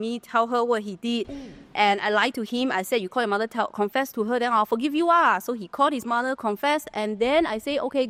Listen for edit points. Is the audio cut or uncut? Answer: uncut